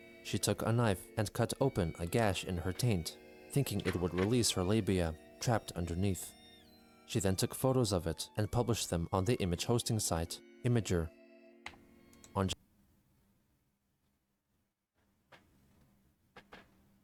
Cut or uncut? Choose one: uncut